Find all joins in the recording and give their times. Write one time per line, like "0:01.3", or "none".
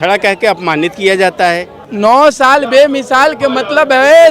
0:01.8